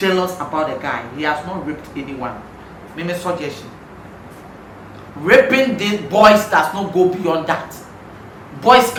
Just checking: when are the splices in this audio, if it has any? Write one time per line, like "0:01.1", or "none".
none